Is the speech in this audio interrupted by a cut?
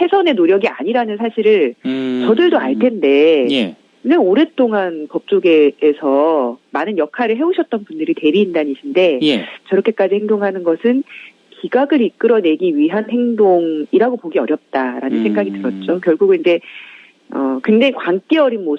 no; 0 cuts

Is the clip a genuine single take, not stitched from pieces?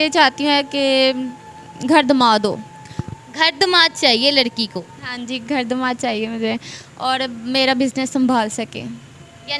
yes; 0 cuts

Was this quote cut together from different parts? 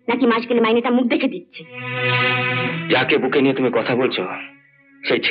yes; 1 cut; at 2.7 s

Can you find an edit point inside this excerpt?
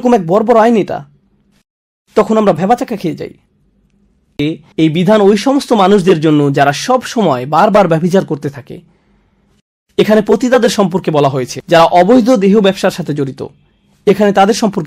yes; 1 cut; at 4.4 s

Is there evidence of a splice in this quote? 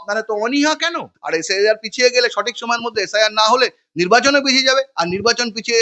yes; 1 cut; at 1.1 s

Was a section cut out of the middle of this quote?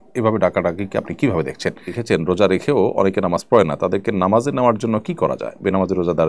yes; 1 cut; at 1.9 s

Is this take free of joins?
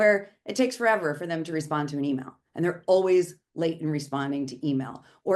yes; 0 cuts

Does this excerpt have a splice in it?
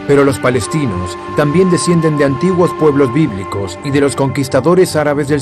yes; 1 cut; at 1.5 s

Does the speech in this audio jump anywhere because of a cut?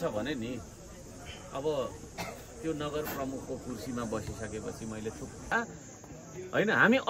yes; 1 cut; at 5.5 s

